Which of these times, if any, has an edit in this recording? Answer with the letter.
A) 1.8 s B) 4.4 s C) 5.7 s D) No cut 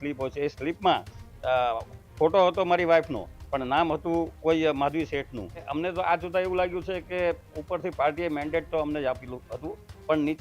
C